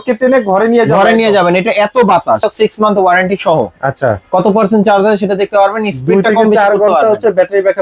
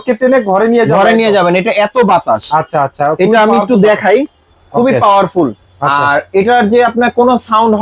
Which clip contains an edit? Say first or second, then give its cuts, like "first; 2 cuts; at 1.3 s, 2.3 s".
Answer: first; 1 cut; at 2.4 s